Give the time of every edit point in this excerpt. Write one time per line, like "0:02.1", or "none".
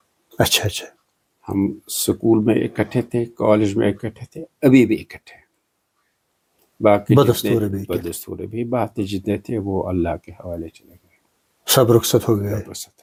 none